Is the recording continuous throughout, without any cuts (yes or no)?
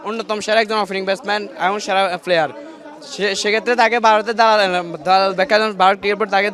yes